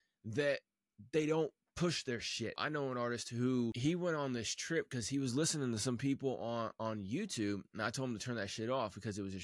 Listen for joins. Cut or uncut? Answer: cut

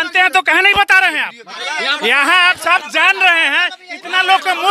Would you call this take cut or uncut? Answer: cut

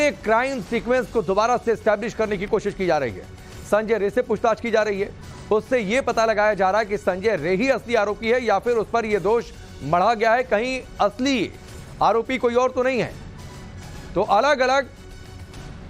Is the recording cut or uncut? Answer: cut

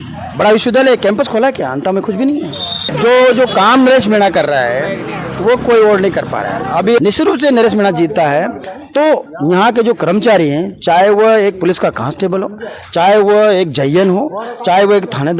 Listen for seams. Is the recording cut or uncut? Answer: cut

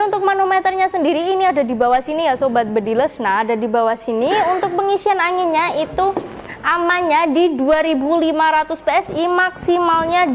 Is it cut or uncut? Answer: uncut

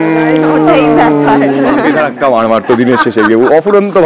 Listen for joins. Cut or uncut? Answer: cut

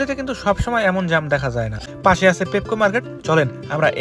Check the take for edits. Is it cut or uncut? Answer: cut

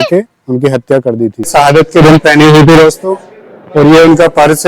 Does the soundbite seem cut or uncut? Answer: cut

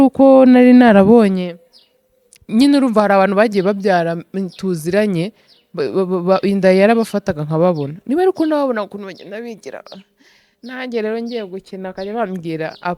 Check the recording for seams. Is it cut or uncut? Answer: uncut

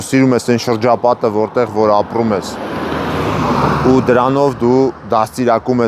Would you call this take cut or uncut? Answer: uncut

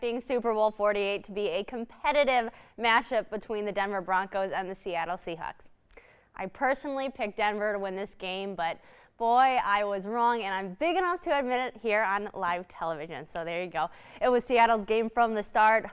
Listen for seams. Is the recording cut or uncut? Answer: uncut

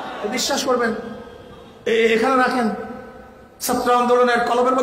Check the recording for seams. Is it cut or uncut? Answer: uncut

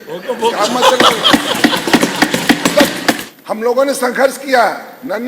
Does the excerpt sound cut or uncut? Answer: cut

